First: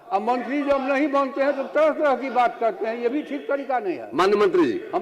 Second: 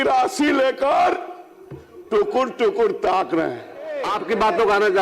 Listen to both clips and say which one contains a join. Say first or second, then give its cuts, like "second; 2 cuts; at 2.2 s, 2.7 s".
second; 1 cut; at 4.1 s